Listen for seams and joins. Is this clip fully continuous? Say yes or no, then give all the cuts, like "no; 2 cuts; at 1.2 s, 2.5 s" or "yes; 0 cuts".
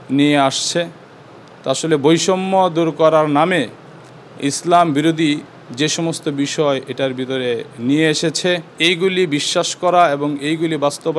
no; 1 cut; at 8.7 s